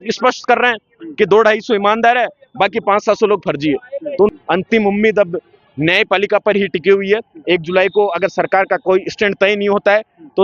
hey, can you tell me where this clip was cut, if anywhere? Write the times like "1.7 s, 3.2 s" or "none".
4.3 s